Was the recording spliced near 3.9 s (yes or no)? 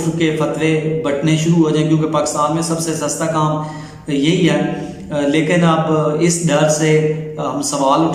no